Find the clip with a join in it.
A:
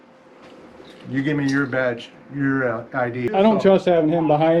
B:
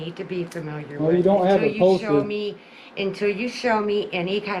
A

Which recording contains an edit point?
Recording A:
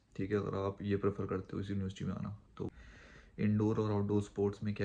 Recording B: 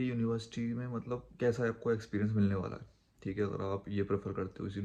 A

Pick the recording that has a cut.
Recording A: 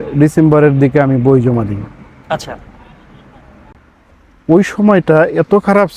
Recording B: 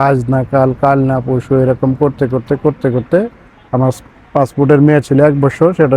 A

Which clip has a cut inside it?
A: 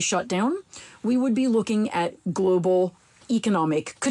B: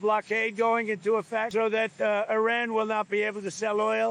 B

